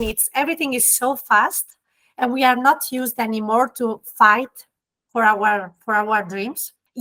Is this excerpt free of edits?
yes; 0 cuts

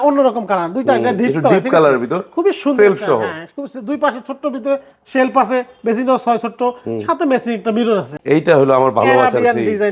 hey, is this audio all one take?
no; 1 cut; at 8.2 s

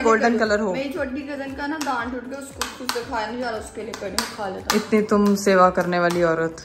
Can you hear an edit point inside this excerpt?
no; 0 cuts

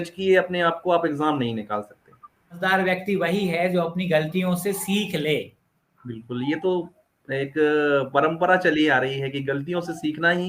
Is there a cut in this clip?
yes; 1 cut; at 2.6 s

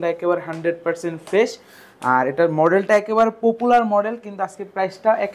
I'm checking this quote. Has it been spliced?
no; 0 cuts

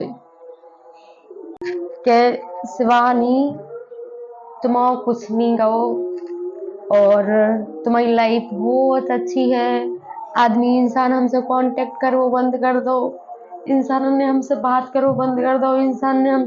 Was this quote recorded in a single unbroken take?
no; 1 cut; at 1.6 s

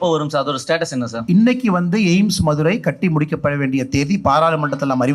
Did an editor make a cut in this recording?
yes; 1 cut; at 1.2 s

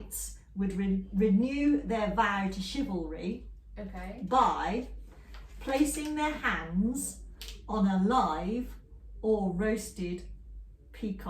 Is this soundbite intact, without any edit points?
yes; 0 cuts

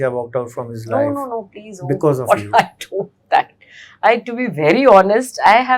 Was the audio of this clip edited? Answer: no; 0 cuts

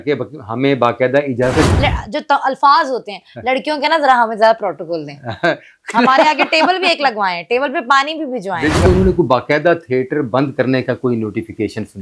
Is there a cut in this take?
yes; 2 cuts; at 1.7 s, 8.9 s

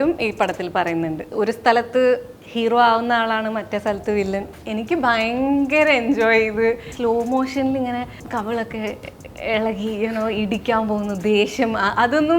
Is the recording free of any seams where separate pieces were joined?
no; 4 cuts; at 1.2 s, 4.6 s, 6.9 s, 8.2 s

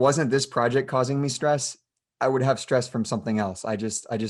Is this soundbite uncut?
yes; 0 cuts

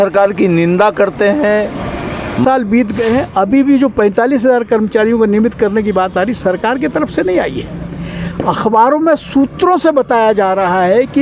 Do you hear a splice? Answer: yes; 1 cut; at 2.4 s

